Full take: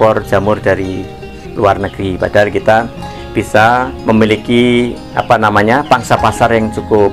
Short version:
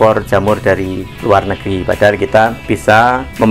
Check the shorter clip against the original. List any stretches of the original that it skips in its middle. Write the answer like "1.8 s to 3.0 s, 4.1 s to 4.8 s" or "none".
1.1 s to 1.4 s, 2.9 s to 3.3 s